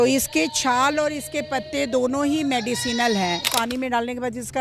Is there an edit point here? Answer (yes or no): yes